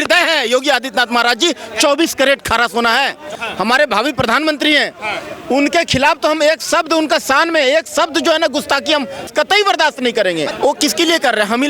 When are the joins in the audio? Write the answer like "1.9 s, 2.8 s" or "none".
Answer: 3.3 s, 9.3 s, 10.5 s